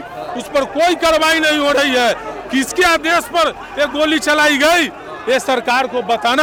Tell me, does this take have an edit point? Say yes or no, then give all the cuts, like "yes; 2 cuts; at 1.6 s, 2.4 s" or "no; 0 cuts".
no; 0 cuts